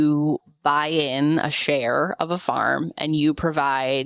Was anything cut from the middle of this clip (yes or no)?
no